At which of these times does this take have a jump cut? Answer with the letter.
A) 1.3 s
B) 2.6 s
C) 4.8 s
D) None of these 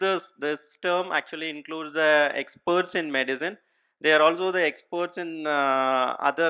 D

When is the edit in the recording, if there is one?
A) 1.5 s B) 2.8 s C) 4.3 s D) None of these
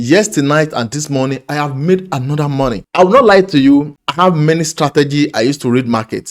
B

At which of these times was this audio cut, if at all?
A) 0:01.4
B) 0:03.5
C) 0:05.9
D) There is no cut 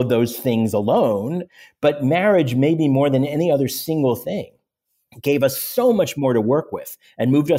A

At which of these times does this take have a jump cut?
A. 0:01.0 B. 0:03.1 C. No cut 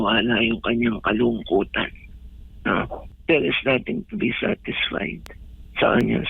B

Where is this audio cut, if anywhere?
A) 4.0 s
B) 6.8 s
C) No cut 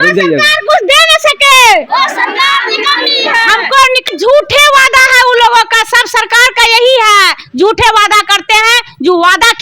A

